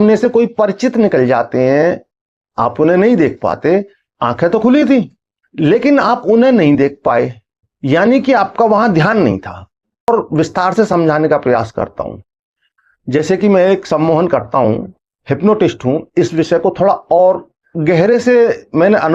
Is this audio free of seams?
no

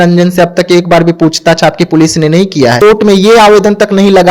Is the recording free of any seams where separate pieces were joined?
no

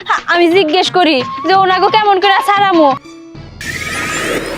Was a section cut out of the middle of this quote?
yes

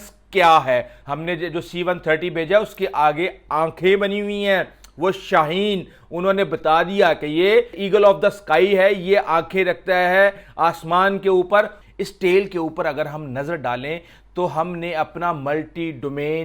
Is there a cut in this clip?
yes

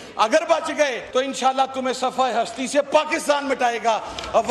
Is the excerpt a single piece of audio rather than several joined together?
no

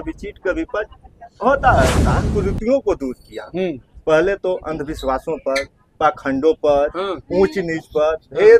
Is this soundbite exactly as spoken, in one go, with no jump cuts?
no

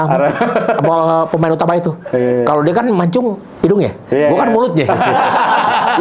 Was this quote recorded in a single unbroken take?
yes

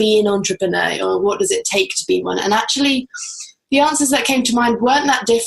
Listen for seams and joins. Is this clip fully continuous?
yes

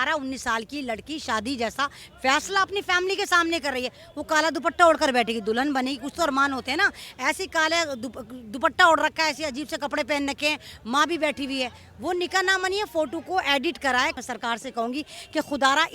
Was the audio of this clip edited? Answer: yes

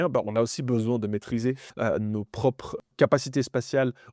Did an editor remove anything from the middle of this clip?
yes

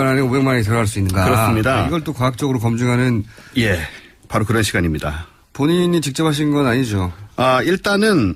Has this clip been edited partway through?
yes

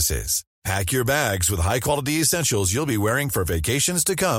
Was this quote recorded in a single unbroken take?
yes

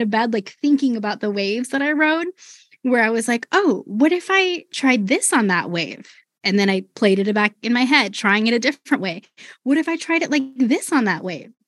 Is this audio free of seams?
yes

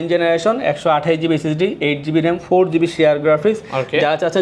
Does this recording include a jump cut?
no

